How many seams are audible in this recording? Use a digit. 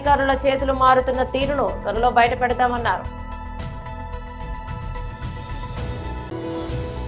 2